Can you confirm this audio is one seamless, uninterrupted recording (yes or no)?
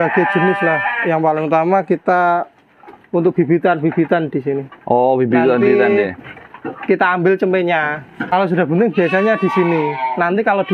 no